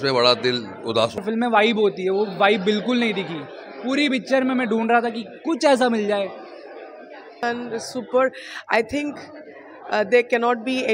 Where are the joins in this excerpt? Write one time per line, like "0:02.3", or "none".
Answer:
0:01.2
0:07.4